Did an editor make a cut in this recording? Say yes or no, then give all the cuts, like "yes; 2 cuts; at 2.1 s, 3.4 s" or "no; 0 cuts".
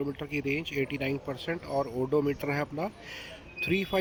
no; 0 cuts